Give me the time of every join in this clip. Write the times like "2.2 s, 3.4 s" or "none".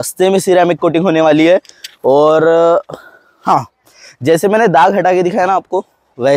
none